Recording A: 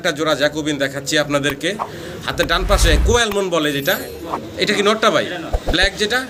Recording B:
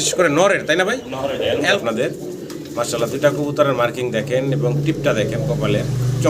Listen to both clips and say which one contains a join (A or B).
B